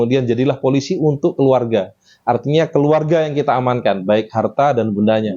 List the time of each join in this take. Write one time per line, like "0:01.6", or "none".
none